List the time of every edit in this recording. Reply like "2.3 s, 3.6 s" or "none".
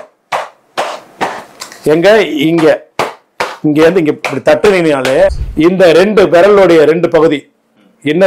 5.4 s